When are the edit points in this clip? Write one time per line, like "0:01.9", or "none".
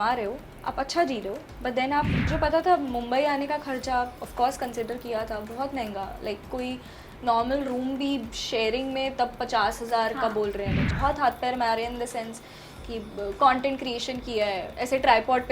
0:02.2
0:10.9